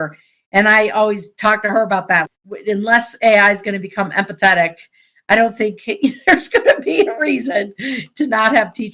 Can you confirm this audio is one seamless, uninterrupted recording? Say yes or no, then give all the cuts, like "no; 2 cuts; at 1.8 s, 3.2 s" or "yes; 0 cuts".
no; 1 cut; at 2.4 s